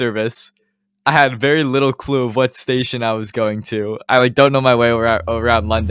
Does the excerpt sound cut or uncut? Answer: uncut